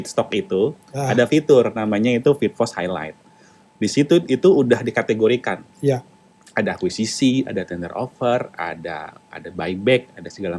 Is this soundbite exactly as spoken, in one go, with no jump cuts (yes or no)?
yes